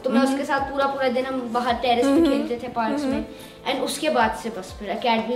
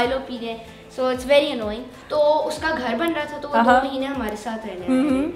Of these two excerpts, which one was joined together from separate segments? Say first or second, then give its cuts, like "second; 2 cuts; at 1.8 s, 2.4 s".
second; 1 cut; at 2.0 s